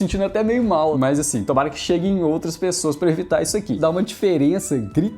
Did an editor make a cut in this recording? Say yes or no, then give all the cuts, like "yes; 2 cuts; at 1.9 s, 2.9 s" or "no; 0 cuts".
yes; 2 cuts; at 0.9 s, 3.8 s